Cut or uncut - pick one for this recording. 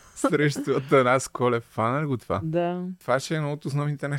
cut